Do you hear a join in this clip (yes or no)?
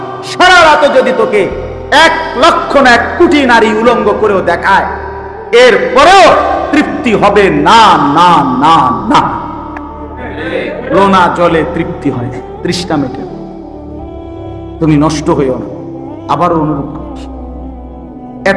no